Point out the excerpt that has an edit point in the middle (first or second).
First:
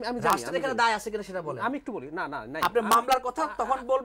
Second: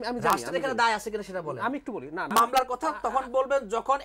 second